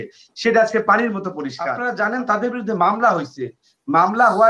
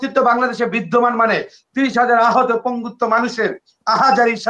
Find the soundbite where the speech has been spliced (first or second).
first